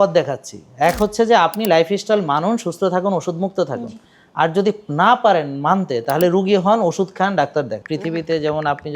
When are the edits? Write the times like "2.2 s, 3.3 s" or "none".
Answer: 7.8 s